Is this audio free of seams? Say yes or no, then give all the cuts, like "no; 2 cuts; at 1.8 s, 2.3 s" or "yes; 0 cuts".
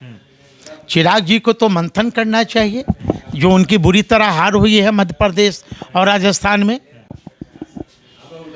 yes; 0 cuts